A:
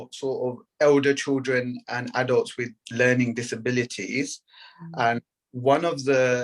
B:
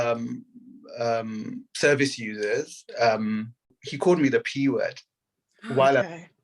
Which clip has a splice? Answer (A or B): B